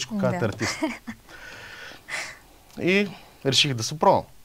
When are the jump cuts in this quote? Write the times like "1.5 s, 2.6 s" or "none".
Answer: none

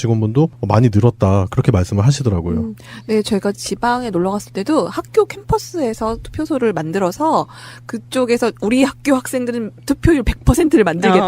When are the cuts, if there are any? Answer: 4.1 s

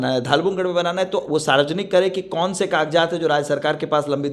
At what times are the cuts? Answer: none

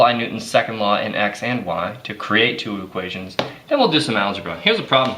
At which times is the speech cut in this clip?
3.8 s

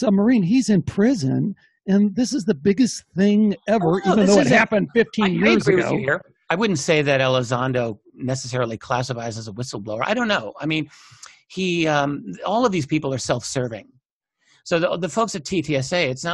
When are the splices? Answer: none

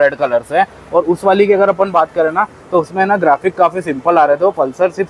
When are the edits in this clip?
none

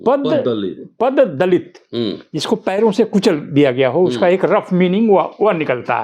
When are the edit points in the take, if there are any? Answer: none

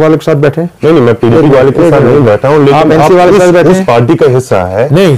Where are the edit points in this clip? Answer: none

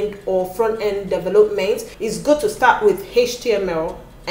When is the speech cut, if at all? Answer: 1.9 s

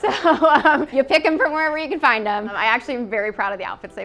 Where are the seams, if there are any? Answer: 0.9 s, 2.6 s

